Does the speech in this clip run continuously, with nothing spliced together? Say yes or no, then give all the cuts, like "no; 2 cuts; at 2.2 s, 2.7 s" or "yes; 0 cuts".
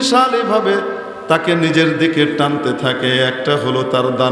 yes; 0 cuts